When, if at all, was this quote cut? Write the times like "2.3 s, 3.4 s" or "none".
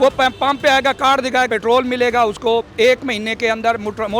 1.5 s